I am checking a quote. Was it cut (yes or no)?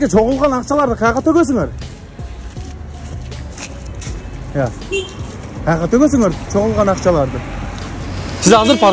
no